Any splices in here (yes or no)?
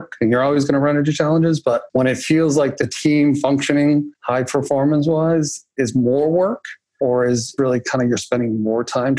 yes